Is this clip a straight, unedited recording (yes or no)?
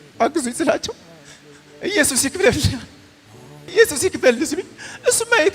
no